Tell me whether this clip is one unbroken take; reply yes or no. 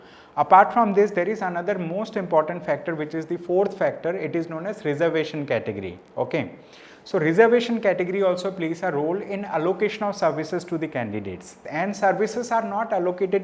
no